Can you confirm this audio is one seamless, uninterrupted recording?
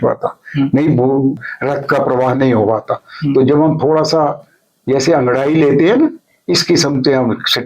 no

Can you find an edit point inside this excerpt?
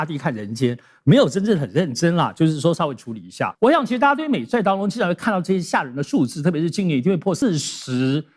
yes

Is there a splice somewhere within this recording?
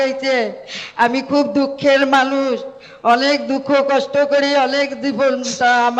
no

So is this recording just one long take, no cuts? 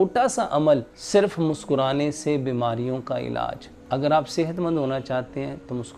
no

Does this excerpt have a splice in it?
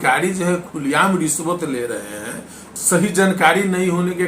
yes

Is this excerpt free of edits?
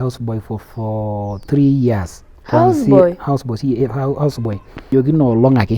no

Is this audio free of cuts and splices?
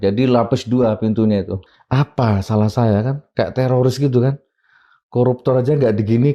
no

